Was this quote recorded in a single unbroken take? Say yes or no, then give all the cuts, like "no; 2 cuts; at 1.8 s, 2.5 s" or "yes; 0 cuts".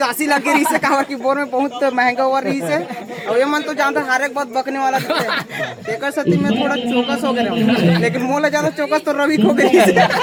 yes; 0 cuts